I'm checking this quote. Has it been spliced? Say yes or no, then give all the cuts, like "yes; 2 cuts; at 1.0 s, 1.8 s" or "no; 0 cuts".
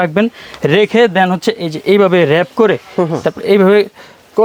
no; 0 cuts